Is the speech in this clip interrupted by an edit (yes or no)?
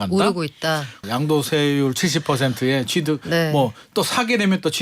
yes